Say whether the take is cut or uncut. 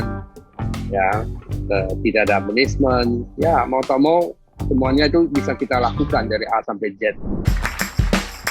cut